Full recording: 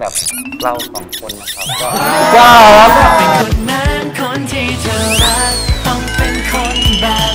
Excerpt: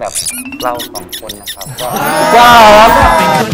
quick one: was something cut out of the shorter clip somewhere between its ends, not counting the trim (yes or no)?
no